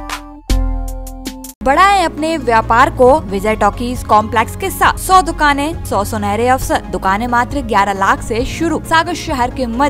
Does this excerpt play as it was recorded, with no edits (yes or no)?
no